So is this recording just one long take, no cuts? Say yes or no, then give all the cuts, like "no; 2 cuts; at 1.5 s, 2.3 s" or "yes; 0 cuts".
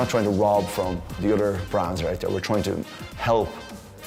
yes; 0 cuts